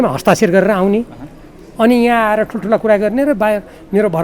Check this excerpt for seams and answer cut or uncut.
uncut